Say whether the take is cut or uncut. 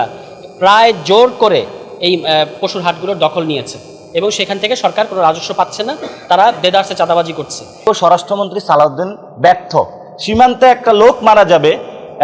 cut